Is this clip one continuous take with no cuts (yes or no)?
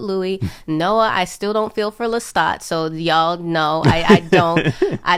yes